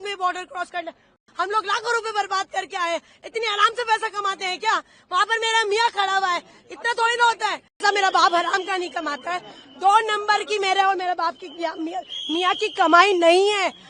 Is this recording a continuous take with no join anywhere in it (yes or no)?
no